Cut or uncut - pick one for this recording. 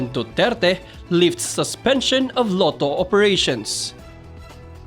cut